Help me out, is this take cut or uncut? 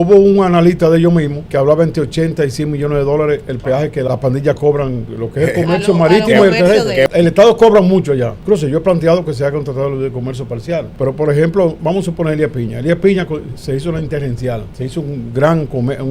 cut